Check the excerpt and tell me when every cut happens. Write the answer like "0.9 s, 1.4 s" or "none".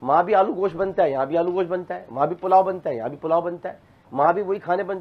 none